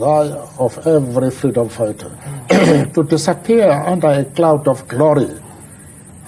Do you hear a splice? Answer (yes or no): no